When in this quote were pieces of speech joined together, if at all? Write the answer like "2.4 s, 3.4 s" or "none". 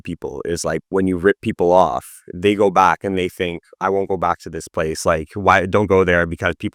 none